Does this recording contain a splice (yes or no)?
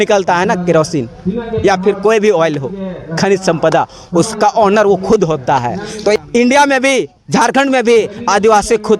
yes